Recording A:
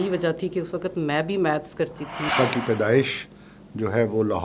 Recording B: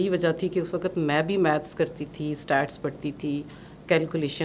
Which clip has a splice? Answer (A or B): A